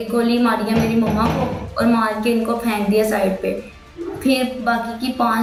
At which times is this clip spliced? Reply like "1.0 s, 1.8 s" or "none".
none

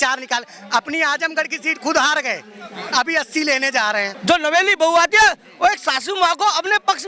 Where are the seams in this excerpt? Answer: 4.1 s

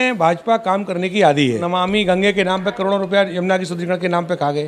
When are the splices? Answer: 1.6 s

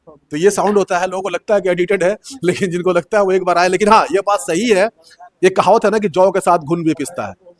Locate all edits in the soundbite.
none

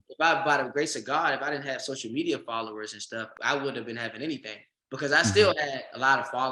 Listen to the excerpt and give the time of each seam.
3.3 s

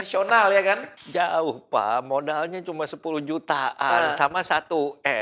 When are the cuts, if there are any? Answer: 0.9 s

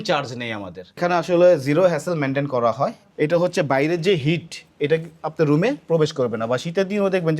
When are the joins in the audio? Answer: 1.0 s, 3.0 s

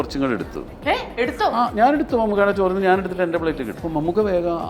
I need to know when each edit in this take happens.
3.7 s

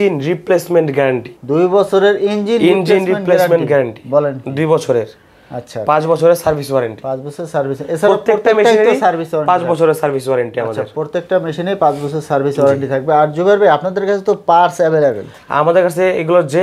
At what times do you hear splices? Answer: none

